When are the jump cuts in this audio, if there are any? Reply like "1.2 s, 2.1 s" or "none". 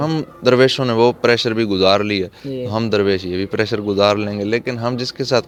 none

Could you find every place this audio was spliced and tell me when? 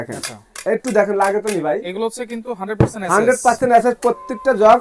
none

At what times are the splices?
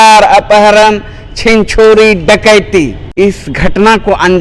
3.0 s

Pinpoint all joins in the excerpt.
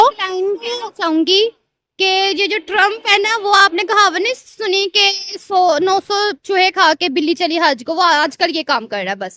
none

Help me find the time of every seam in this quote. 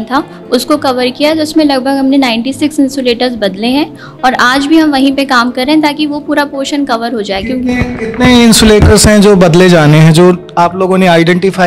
none

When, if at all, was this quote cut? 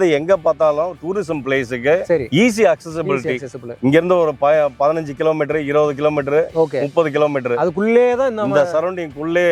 none

